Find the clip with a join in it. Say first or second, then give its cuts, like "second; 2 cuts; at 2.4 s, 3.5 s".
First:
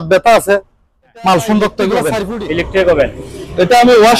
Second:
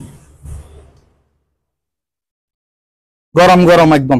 first; 1 cut; at 2.3 s